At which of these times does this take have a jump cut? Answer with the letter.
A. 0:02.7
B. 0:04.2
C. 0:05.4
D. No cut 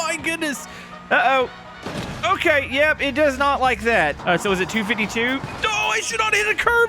B